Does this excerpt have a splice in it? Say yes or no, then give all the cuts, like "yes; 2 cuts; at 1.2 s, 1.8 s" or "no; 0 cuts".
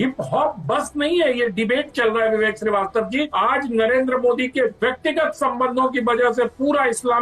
yes; 1 cut; at 3.3 s